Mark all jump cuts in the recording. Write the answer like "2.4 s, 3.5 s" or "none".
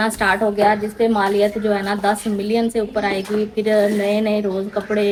none